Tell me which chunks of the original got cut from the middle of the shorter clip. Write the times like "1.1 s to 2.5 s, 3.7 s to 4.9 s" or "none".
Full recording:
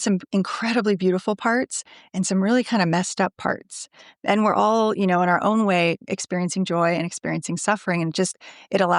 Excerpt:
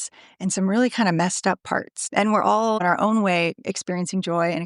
3.7 s to 4.1 s, 4.9 s to 5.2 s

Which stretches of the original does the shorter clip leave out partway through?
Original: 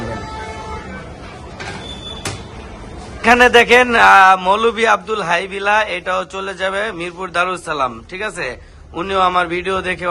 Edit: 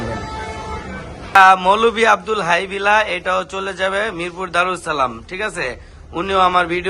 1.4 s to 4.2 s

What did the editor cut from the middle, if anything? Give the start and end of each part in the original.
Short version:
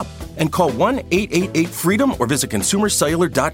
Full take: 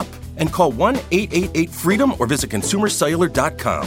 none

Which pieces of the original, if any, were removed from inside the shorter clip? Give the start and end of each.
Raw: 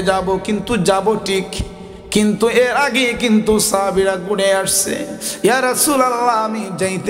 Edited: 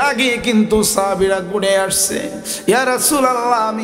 none

